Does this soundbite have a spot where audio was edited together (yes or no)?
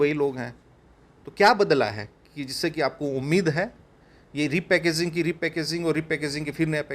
no